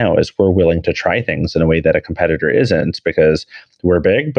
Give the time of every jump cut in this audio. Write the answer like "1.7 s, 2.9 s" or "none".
none